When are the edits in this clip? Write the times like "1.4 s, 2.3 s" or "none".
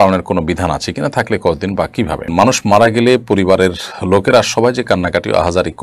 2.3 s